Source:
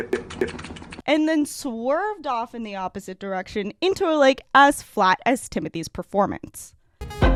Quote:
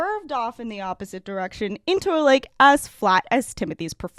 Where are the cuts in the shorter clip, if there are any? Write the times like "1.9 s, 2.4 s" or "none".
none